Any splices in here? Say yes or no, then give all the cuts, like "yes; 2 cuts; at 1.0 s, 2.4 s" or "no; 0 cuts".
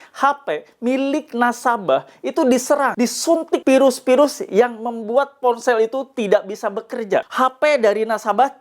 yes; 2 cuts; at 3.4 s, 7.3 s